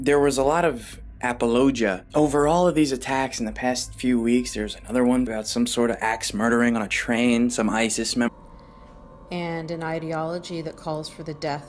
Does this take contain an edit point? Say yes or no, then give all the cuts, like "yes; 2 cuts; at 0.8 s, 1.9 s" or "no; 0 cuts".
no; 0 cuts